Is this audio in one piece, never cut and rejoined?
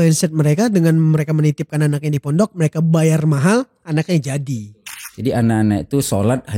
no; 1 cut; at 4.6 s

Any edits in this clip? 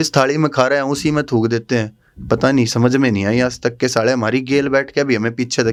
no; 0 cuts

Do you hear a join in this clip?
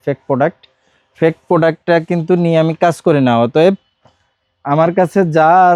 no; 0 cuts

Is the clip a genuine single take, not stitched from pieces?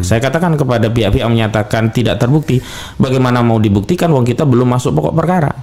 yes; 0 cuts

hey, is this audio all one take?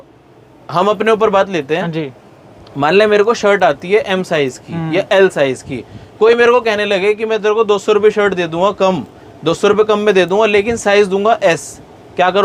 yes; 0 cuts

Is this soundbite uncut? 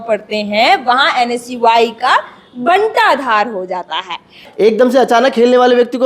no; 1 cut; at 4.5 s

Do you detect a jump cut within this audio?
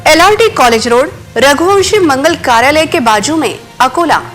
no; 0 cuts

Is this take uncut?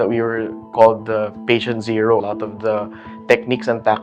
no; 1 cut; at 2.2 s

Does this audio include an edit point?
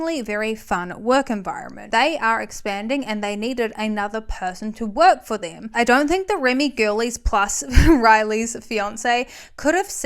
yes; 2 cuts; at 1.8 s, 5.6 s

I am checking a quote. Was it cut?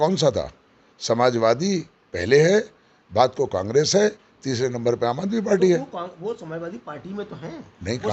no; 0 cuts

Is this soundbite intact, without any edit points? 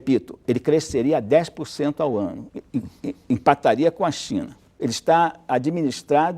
no; 1 cut; at 4.8 s

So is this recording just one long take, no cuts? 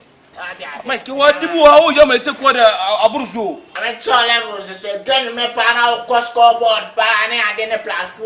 no; 1 cut; at 3.7 s

